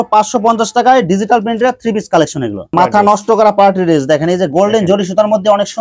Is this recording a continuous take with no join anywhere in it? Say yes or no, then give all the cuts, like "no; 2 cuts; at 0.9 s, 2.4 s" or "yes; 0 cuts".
no; 1 cut; at 2.6 s